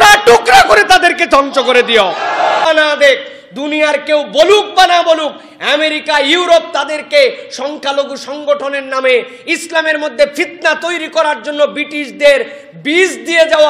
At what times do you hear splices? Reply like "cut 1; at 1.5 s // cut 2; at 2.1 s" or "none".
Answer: cut 1; at 2.7 s